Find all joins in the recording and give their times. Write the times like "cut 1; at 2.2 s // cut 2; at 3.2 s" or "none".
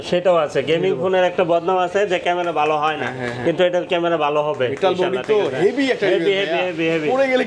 none